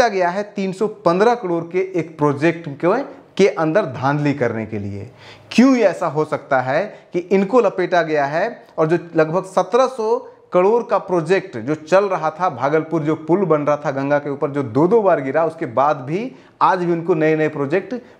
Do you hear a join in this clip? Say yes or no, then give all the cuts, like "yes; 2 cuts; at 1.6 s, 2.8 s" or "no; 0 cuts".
no; 0 cuts